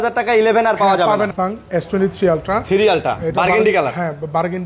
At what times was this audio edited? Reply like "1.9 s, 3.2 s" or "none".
1.3 s